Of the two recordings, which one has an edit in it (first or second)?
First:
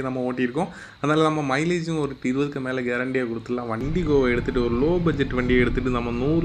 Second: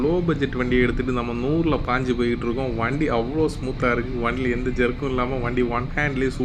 first